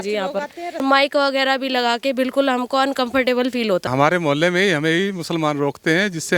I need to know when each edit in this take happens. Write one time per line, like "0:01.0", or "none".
0:00.8
0:03.9